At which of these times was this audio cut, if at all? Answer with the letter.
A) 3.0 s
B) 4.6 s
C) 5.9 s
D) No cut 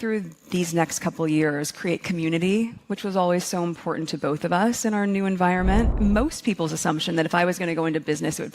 C